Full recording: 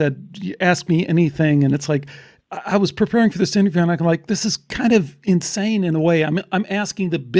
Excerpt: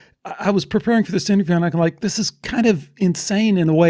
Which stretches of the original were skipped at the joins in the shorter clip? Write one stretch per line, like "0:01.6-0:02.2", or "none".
none